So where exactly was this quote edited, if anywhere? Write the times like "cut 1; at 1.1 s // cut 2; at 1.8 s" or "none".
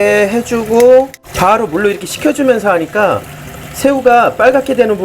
cut 1; at 1.3 s